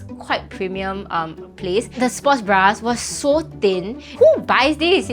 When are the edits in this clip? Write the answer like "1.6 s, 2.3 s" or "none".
2.0 s, 4.1 s

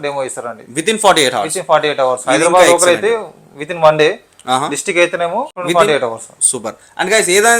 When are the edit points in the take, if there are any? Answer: 5.6 s

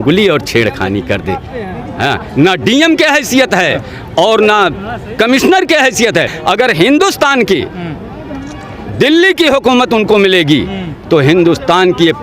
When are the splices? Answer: 6.3 s

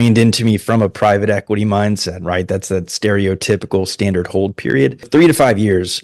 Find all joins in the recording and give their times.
5.1 s

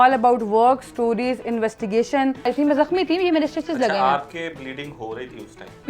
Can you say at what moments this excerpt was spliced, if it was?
2.4 s

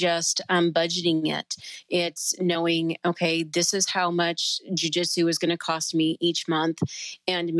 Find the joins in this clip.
none

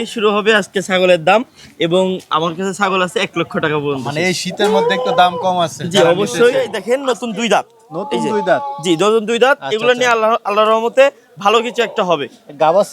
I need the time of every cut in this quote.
6.7 s

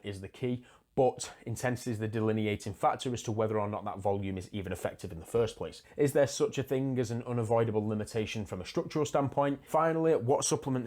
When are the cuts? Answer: 5.8 s, 9.7 s

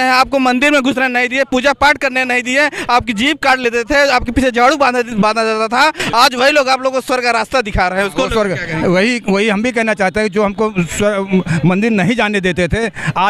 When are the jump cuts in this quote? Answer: none

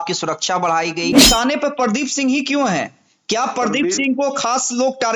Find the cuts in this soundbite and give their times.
1.2 s

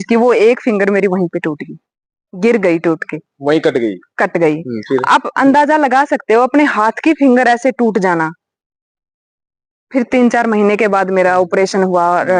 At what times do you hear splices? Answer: none

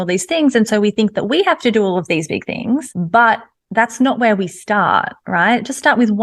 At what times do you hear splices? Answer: 2.9 s

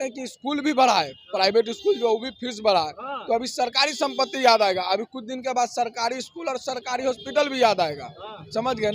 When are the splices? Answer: none

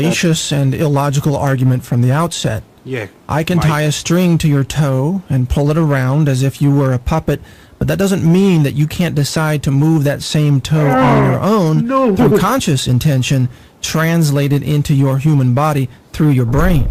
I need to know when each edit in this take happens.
none

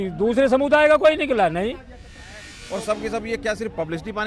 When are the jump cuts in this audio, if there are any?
2.5 s

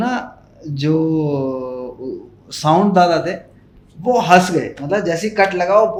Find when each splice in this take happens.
none

